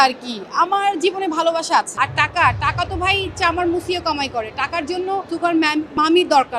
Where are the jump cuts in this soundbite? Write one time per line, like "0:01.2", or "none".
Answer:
0:01.9
0:05.7